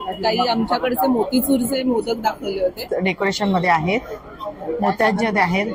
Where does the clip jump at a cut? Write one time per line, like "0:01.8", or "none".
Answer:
0:02.9